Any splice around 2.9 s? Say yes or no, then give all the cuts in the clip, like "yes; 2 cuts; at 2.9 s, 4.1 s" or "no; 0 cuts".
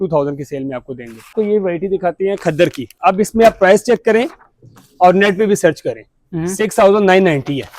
yes; 2 cuts; at 1.3 s, 2.9 s